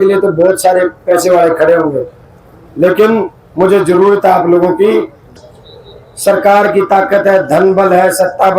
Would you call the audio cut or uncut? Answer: cut